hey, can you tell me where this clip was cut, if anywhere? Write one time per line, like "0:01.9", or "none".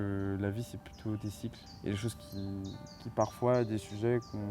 0:01.7